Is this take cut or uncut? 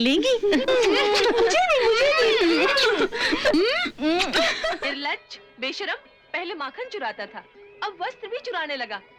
cut